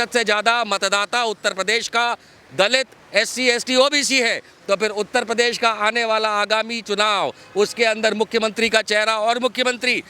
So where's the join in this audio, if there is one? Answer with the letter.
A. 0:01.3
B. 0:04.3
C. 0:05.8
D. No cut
D